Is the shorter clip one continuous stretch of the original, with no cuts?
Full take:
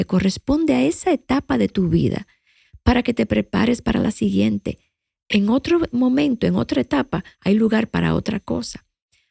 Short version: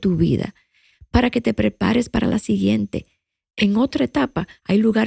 no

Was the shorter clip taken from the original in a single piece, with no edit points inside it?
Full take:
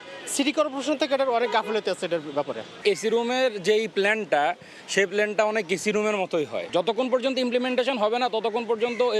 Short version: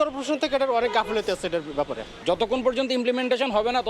no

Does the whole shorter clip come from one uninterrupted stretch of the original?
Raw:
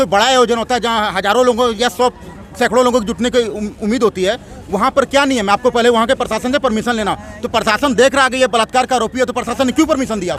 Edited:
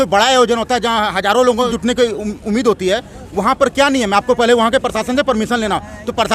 no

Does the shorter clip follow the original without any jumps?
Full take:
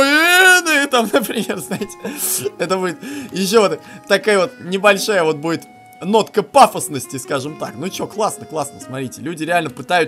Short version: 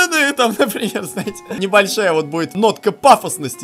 no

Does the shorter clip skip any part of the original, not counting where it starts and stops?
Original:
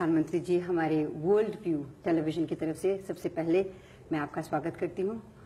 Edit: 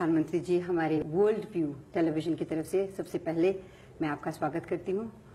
yes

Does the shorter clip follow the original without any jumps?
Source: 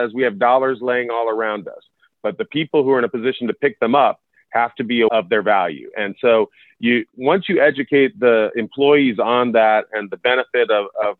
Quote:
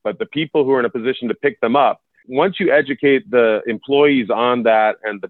no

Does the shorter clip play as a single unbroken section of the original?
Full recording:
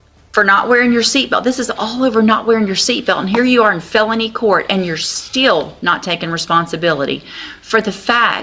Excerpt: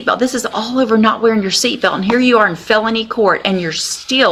yes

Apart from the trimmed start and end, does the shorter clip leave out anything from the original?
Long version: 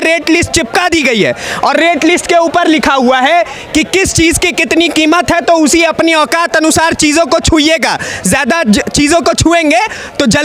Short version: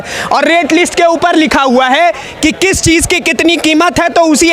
no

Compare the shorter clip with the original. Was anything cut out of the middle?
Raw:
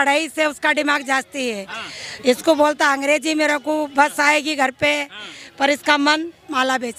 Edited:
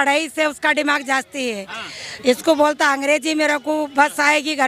no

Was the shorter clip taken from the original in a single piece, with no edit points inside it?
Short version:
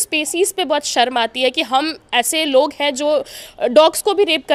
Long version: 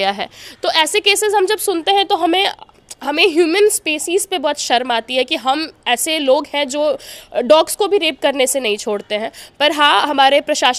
yes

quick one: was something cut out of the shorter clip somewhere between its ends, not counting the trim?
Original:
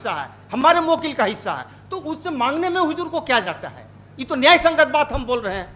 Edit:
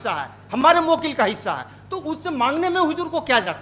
no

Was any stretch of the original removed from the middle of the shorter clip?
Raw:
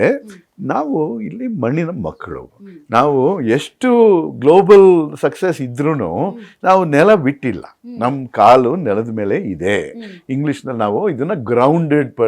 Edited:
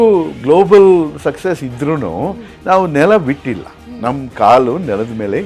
no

